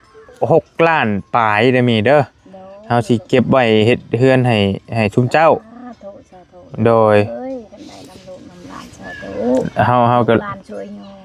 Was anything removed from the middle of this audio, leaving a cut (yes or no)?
no